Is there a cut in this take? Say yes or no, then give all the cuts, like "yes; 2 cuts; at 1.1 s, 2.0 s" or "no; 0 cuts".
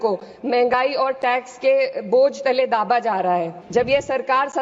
yes; 1 cut; at 3.6 s